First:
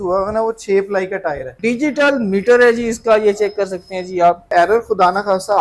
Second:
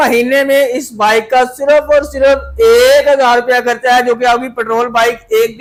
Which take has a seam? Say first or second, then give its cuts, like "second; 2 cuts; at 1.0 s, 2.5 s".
first; 2 cuts; at 1.5 s, 4.4 s